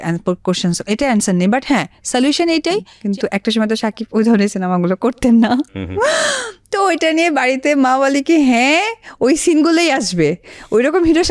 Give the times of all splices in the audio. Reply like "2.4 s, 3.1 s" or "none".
2.9 s